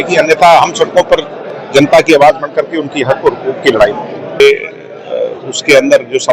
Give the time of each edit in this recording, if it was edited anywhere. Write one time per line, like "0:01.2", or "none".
0:04.4